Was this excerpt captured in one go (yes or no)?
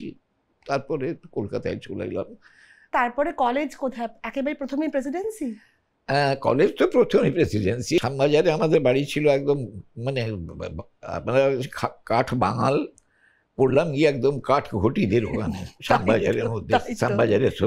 no